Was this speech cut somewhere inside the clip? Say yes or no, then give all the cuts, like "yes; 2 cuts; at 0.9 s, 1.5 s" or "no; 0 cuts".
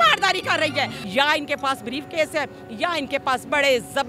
yes; 1 cut; at 1.0 s